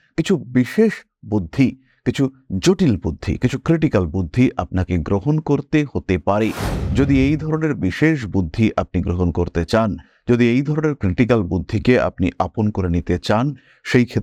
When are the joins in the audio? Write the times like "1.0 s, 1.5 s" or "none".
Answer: none